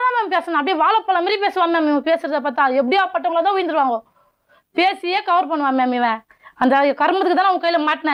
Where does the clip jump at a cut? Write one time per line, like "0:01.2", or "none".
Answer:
none